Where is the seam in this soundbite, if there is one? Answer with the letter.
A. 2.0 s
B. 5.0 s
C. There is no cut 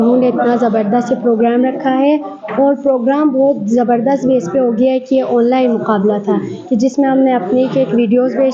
C